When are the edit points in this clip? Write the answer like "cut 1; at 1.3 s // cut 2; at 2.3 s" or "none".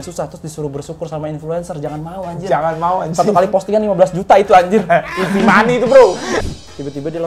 cut 1; at 6.3 s